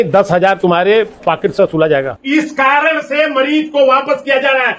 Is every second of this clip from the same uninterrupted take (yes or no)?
no